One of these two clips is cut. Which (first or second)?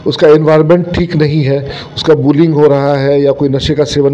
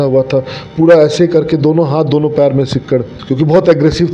second